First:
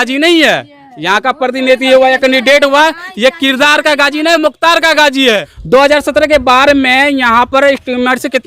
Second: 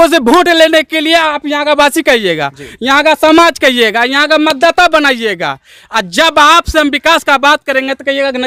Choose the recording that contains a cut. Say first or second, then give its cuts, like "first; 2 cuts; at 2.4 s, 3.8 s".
first; 1 cut; at 5.5 s